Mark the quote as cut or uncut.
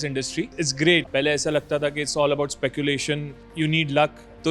cut